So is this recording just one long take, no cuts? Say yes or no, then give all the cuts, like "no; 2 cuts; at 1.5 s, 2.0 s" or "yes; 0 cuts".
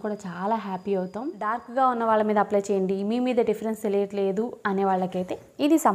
no; 1 cut; at 1.6 s